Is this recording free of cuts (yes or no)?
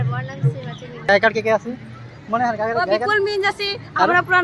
no